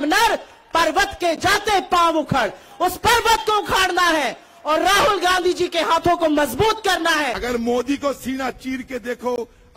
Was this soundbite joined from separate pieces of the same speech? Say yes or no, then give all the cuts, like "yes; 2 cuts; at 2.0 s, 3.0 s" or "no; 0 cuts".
yes; 1 cut; at 7.4 s